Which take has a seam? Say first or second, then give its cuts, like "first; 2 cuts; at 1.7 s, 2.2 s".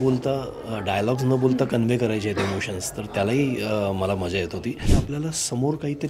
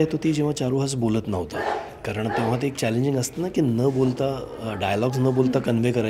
first; 1 cut; at 4.8 s